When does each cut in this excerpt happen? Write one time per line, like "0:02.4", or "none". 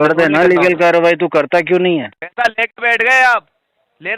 0:02.2